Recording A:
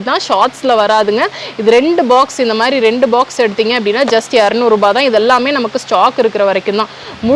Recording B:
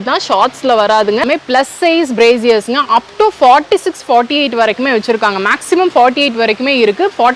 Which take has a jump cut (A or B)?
B